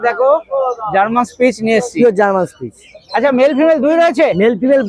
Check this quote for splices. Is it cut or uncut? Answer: uncut